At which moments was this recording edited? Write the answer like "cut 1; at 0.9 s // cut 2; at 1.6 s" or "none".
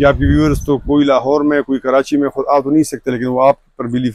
none